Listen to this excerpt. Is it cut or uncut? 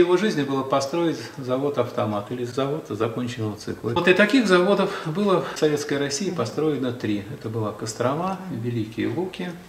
cut